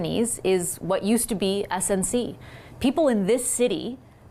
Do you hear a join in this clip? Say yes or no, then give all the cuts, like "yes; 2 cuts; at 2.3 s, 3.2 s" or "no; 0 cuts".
no; 0 cuts